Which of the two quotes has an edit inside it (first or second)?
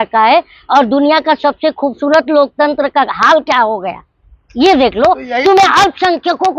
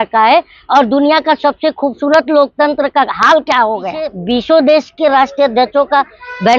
second